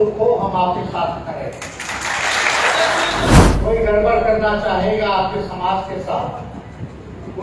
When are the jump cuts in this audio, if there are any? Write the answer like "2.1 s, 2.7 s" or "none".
3.3 s